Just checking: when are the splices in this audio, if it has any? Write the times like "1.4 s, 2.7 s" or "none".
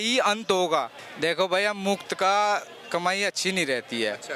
1.0 s